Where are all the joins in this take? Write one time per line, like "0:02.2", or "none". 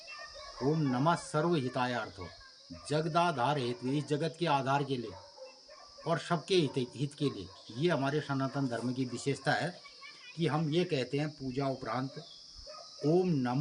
none